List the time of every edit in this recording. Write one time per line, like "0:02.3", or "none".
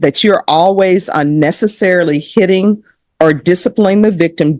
none